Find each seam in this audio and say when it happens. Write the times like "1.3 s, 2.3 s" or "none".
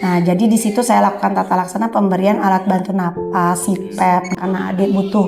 4.4 s